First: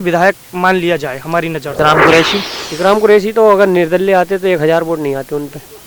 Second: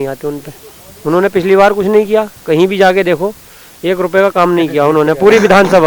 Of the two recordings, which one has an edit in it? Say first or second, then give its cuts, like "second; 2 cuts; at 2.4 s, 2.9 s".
first; 1 cut; at 1.7 s